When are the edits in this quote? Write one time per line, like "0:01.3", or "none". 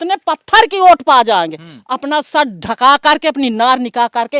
none